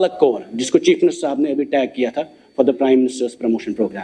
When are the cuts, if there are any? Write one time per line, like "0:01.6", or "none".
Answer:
none